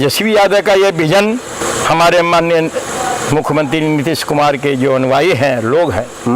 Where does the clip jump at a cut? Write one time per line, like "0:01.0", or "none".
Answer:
0:01.6